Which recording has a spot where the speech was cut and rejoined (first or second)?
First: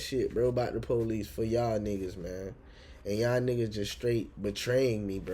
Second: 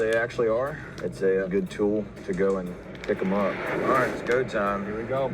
second